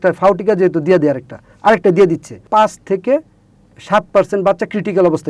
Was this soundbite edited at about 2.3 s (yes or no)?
yes